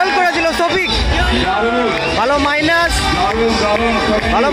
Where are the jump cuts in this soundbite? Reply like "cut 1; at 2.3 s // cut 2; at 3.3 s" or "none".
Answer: none